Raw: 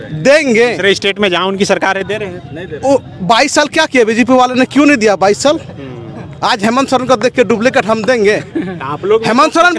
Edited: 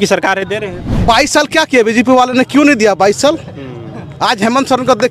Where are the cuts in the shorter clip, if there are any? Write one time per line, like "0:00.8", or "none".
0:00.9